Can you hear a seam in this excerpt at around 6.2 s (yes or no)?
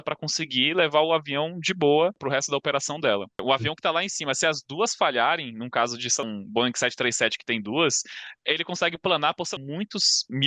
yes